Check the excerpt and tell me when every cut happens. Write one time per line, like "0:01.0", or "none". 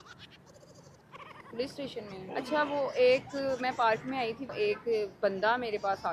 0:02.1